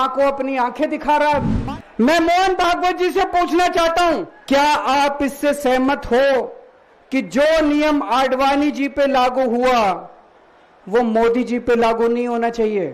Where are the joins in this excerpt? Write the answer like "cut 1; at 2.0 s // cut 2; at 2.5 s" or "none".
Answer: cut 1; at 1.5 s // cut 2; at 4.3 s